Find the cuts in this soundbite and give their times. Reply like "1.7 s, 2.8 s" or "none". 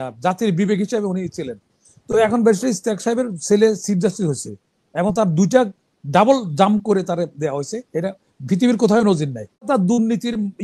9.7 s